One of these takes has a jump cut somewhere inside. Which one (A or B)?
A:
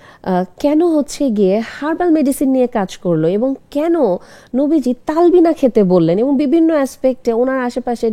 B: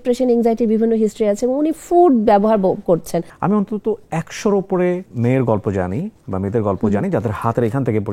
B